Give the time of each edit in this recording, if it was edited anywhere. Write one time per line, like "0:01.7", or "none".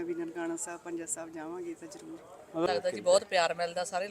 0:02.7

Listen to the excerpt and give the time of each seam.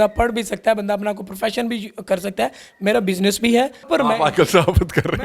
0:00.7
0:02.6
0:03.8

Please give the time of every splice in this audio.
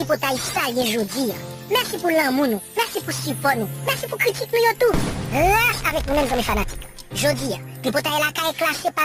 0:05.2

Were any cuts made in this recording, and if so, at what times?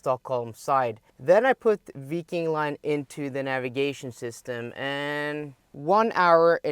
0:01.1
0:05.6

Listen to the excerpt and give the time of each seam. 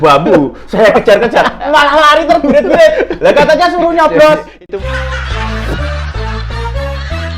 0:04.5

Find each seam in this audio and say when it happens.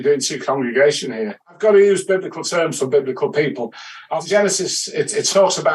0:01.5
0:04.1

